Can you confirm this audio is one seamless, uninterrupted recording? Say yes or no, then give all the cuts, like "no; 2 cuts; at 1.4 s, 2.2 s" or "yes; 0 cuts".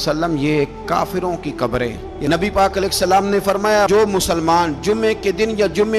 no; 1 cut; at 2.1 s